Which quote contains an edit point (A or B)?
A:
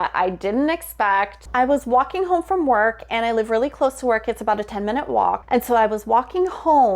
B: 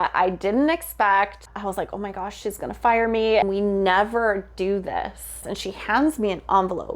B